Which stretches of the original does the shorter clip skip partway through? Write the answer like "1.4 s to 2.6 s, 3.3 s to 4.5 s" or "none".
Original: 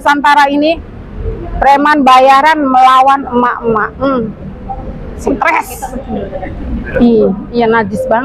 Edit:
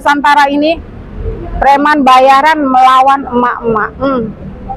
none